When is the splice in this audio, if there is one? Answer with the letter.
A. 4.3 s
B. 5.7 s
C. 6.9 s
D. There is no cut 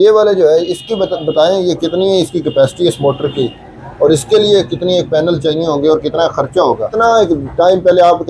C